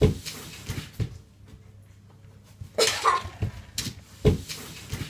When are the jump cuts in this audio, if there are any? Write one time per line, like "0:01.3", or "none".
0:03.3